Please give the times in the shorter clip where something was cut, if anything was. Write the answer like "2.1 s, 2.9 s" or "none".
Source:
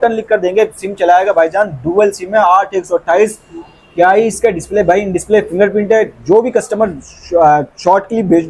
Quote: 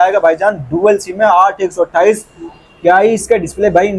none